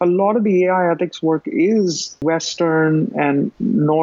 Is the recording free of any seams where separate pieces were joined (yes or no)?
no